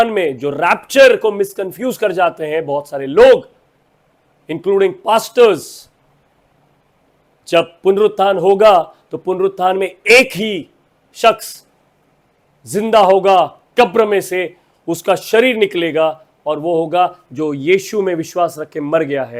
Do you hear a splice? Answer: no; 0 cuts

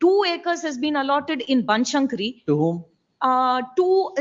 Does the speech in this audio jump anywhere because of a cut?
no; 0 cuts

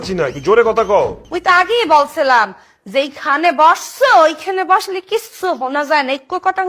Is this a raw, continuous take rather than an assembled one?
no; 1 cut; at 1.2 s

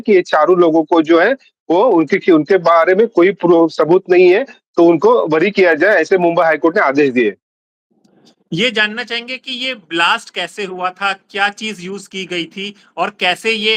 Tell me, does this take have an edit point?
no; 0 cuts

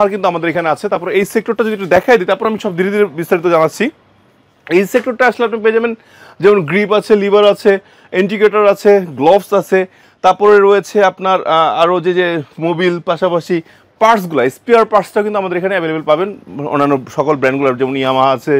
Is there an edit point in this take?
no; 0 cuts

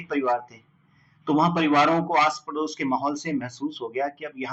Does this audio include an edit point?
no; 0 cuts

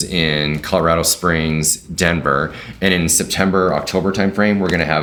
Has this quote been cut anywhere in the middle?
no; 0 cuts

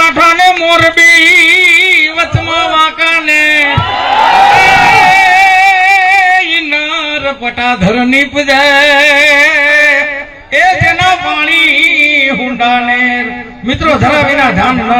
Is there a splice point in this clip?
no; 0 cuts

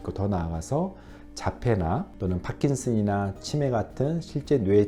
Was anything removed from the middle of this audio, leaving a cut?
yes; 1 cut; at 2.1 s

